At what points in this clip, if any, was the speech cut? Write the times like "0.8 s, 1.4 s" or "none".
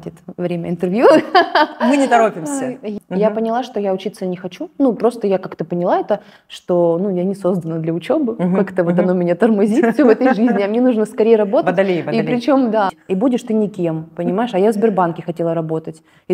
2.9 s, 13.0 s